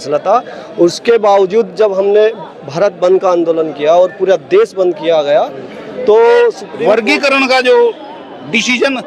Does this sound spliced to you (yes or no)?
yes